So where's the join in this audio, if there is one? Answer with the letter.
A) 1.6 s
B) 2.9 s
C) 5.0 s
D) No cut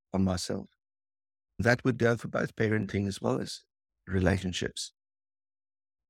A